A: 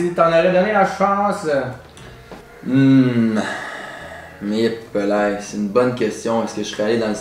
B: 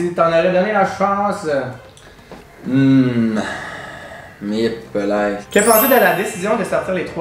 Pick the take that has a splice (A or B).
B